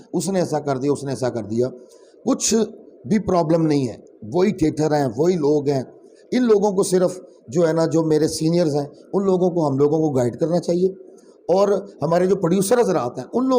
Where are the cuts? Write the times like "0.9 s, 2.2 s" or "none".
none